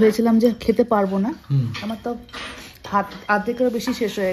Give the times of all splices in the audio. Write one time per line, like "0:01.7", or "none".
none